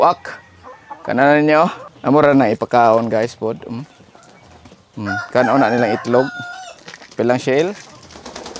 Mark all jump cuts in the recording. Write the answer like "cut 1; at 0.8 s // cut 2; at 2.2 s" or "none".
cut 1; at 1.9 s

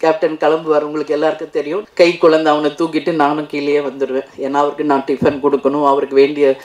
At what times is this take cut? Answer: cut 1; at 1.8 s

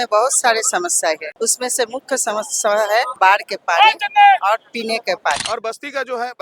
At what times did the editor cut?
cut 1; at 1.3 s // cut 2; at 3.1 s // cut 3; at 5.4 s

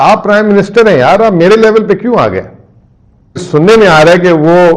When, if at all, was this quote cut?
cut 1; at 3.4 s

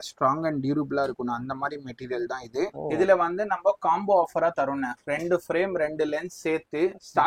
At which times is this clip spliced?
cut 1; at 2.8 s

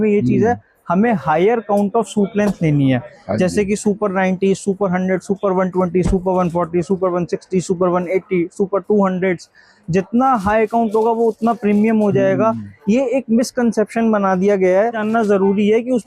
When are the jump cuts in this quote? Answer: cut 1; at 15.0 s

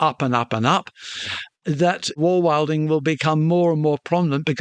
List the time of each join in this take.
cut 1; at 2.2 s

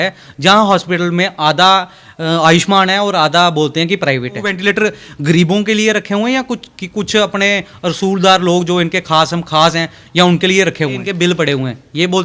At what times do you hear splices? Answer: cut 1; at 4.5 s // cut 2; at 11.1 s

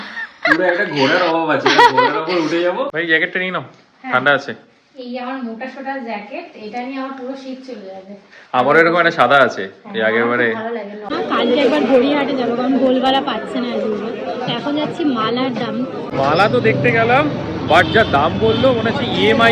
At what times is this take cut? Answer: cut 1; at 3.0 s // cut 2; at 11.1 s // cut 3; at 16.1 s

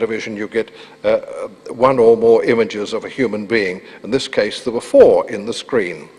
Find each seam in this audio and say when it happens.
cut 1; at 3.4 s

